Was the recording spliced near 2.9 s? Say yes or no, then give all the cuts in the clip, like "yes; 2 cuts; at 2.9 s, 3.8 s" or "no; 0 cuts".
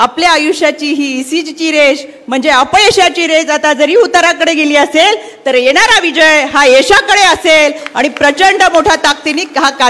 no; 0 cuts